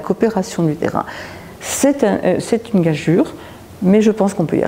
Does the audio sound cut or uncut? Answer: uncut